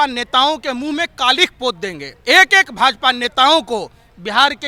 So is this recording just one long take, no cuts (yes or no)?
no